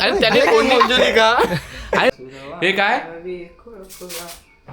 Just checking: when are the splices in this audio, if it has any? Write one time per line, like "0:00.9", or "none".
0:02.2